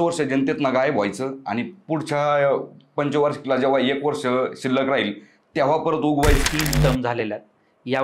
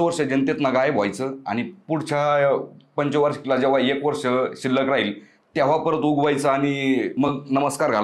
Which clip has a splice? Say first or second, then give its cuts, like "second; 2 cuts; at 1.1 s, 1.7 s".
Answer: first; 1 cut; at 6.4 s